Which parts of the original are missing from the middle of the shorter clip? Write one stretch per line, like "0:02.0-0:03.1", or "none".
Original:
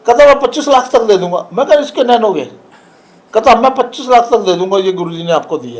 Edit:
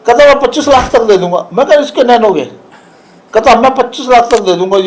none